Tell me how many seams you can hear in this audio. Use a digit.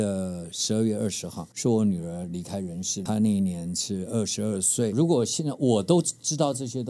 2